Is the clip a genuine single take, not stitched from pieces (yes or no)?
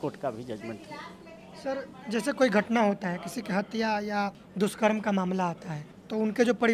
yes